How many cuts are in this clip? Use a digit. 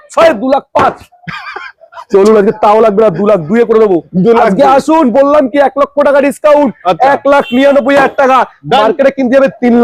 0